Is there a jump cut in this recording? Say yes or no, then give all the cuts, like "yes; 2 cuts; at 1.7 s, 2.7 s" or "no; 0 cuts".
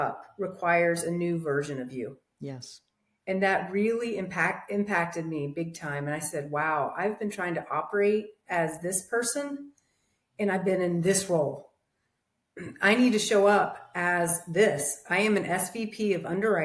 no; 0 cuts